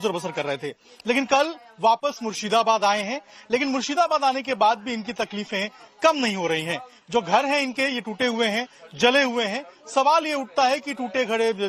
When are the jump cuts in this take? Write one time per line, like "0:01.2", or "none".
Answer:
none